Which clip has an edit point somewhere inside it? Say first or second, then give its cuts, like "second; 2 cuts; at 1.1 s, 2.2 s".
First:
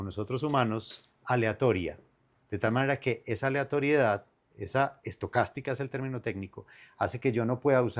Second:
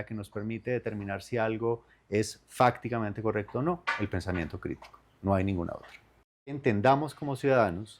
second; 1 cut; at 6.6 s